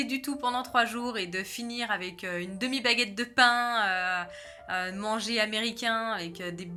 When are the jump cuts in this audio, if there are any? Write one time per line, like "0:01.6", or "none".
none